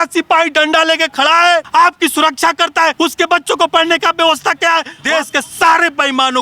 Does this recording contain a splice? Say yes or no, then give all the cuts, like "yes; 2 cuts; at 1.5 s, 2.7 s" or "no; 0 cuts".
yes; 3 cuts; at 1.7 s, 2.9 s, 4.9 s